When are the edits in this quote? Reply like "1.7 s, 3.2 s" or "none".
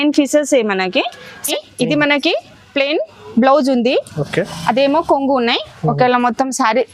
1.4 s